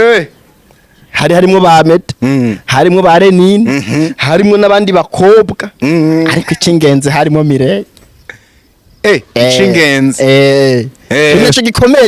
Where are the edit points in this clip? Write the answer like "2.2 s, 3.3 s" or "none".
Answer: none